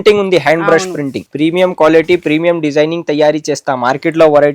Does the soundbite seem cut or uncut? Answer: cut